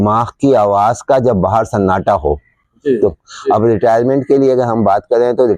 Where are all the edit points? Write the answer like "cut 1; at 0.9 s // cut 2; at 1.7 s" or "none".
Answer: cut 1; at 2.9 s